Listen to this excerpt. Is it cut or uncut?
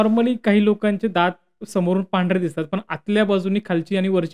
uncut